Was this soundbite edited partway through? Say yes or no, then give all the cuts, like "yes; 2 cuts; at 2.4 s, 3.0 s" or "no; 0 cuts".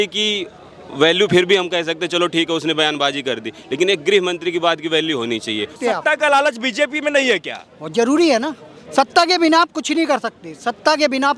yes; 1 cut; at 5.7 s